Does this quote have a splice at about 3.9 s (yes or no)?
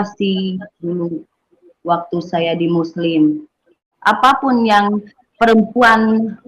yes